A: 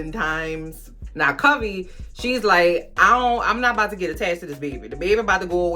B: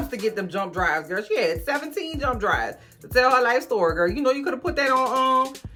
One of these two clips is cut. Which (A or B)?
A